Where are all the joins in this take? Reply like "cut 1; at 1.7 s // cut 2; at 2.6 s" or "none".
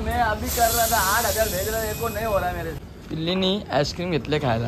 cut 1; at 2.9 s